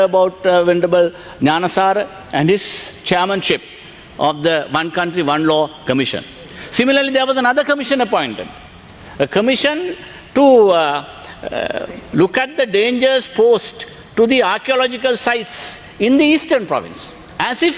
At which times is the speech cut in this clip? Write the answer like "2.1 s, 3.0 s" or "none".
none

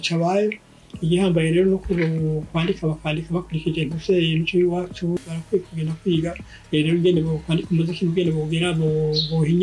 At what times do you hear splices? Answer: 5.4 s

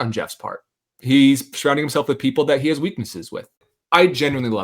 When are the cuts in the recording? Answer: 3.7 s

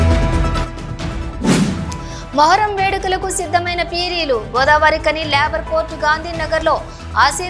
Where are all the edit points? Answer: none

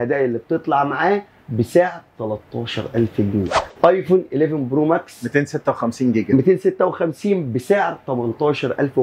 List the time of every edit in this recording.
3.6 s

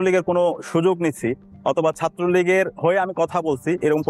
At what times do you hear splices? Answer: none

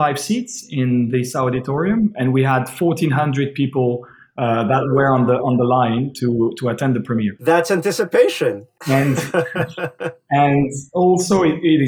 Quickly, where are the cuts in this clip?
none

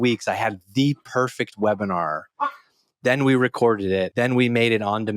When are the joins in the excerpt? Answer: 4.1 s

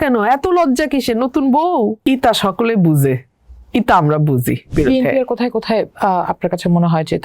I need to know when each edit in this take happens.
2.0 s, 4.7 s

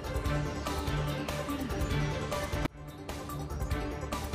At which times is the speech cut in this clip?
1.4 s

